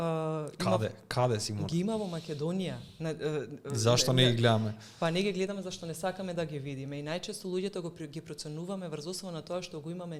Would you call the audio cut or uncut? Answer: uncut